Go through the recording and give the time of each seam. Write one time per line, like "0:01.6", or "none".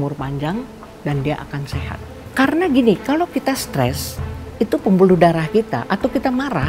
0:02.3